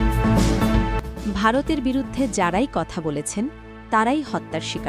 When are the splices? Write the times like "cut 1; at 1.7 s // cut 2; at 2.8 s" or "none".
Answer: none